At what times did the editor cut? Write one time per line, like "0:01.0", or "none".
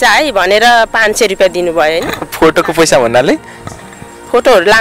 none